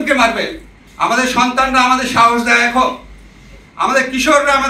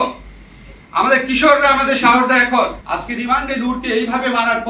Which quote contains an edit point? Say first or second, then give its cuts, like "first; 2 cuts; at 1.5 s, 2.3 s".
second; 1 cut; at 2.9 s